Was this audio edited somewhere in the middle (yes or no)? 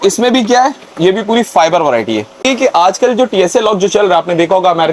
yes